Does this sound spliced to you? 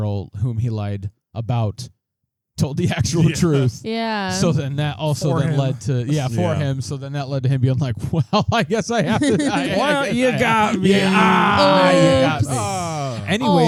no; 0 cuts

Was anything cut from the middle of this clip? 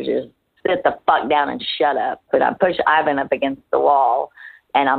yes; 1 cut; at 2.3 s

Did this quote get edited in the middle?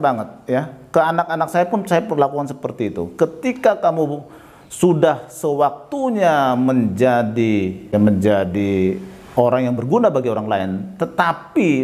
no; 0 cuts

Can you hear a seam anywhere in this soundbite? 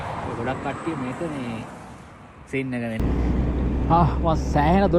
yes; 1 cut; at 3.0 s

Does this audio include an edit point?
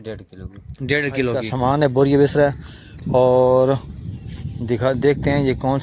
yes; 1 cut; at 1.4 s

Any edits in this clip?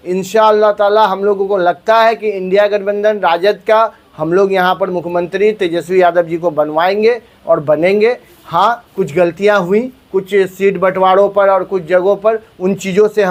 no; 0 cuts

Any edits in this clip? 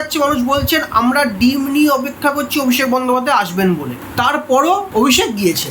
yes; 1 cut; at 3.9 s

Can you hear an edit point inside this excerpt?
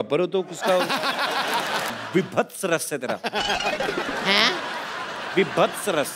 yes; 1 cut; at 1.9 s

